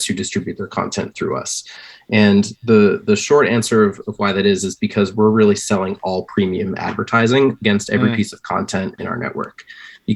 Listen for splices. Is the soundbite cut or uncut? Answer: uncut